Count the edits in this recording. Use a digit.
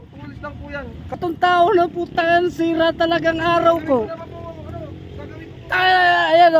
1